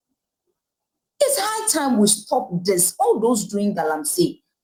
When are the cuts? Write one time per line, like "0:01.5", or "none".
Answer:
none